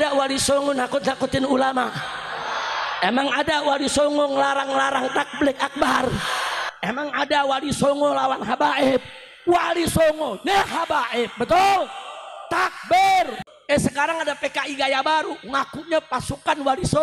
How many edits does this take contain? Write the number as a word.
one